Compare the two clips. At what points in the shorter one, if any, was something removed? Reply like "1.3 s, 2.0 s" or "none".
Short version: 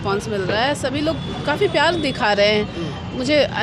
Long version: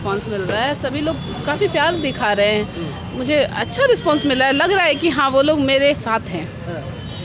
none